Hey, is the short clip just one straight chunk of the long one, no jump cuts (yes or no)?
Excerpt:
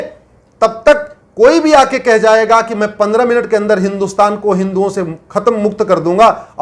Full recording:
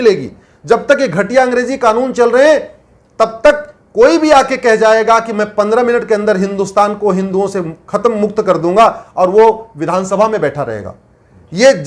yes